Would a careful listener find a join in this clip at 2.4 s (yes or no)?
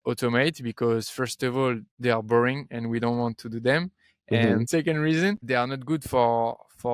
no